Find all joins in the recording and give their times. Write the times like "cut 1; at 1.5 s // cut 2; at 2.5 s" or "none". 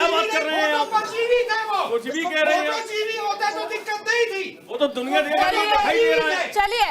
none